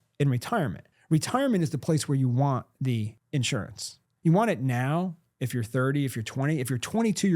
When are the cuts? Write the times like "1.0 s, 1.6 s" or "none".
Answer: 3.2 s